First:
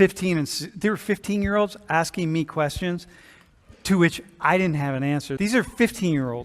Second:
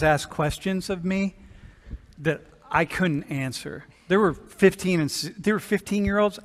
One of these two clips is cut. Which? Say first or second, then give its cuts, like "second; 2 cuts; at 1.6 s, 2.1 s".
first; 1 cut; at 5.3 s